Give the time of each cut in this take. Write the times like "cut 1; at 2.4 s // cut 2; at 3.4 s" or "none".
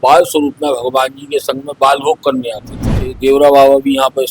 cut 1; at 3.1 s

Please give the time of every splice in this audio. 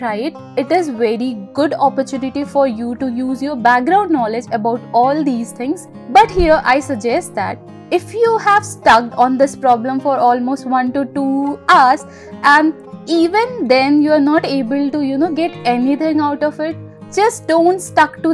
none

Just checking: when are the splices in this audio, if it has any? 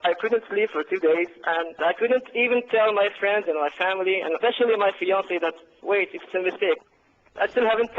cut 1; at 1.8 s // cut 2; at 5.7 s // cut 3; at 6.8 s

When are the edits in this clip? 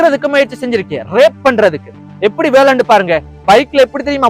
cut 1; at 3.3 s

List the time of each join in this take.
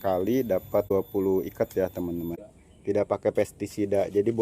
cut 1; at 0.9 s // cut 2; at 2.8 s

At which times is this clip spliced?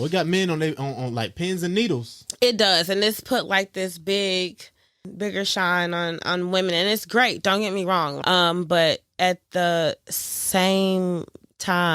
cut 1; at 5.1 s // cut 2; at 8.2 s

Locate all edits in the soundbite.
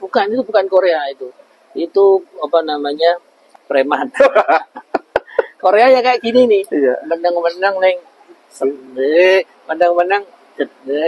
cut 1; at 3.4 s

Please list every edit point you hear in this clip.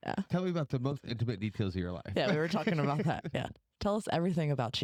none

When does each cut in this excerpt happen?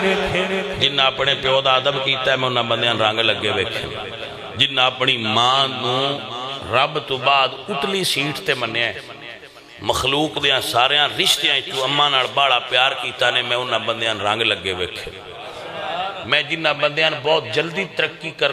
none

